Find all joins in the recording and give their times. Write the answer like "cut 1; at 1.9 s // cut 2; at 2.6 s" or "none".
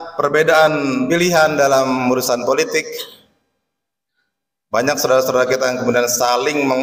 cut 1; at 1.1 s